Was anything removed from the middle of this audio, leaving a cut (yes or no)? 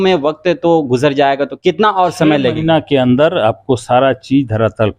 yes